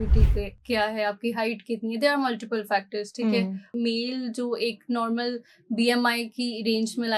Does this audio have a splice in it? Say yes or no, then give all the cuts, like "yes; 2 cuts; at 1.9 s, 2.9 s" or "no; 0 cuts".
yes; 1 cut; at 3.7 s